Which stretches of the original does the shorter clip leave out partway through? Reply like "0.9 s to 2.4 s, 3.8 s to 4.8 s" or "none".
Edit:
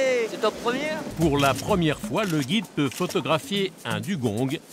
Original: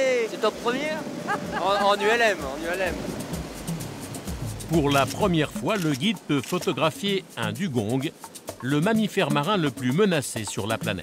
1.1 s to 4.6 s